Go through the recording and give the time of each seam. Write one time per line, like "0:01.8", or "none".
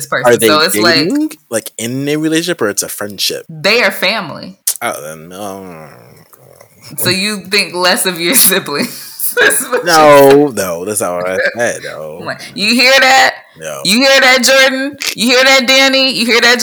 0:03.5
0:04.6